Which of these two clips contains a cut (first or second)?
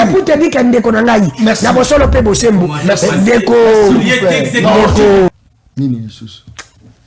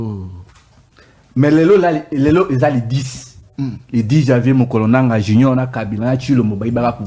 first